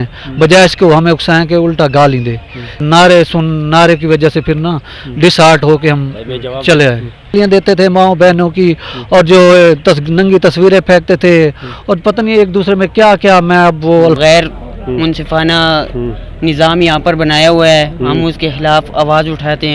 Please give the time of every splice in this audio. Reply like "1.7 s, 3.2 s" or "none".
2.8 s, 7.3 s, 14.2 s